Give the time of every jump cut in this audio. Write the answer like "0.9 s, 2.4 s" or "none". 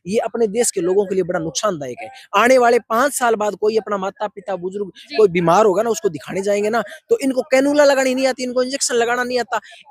none